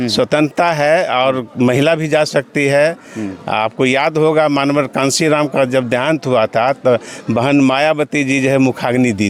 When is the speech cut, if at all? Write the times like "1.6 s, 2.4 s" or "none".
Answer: none